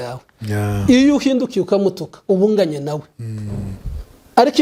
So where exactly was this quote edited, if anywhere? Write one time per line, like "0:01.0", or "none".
none